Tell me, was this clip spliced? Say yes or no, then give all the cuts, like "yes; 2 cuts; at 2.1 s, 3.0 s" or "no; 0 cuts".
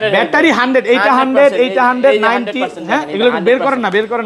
no; 0 cuts